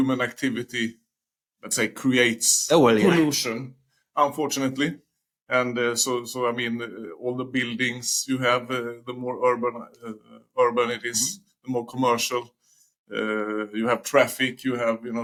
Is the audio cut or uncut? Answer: uncut